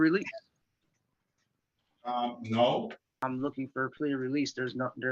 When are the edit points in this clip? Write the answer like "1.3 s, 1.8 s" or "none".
3.1 s